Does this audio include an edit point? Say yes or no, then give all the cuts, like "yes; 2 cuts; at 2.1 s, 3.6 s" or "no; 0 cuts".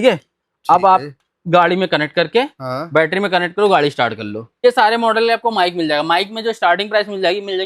yes; 1 cut; at 4.6 s